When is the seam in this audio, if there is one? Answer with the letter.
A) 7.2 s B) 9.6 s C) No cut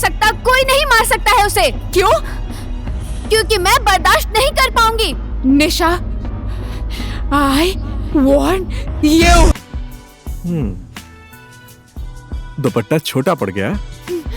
B